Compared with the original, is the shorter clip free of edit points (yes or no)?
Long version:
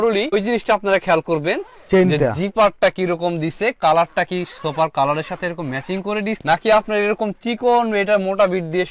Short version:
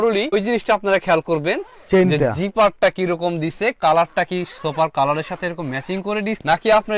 yes